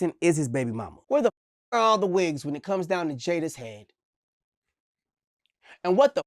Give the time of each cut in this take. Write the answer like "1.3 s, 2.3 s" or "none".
0.9 s, 4.6 s